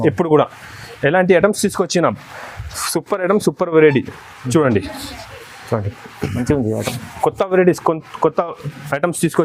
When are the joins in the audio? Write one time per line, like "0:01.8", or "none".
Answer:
none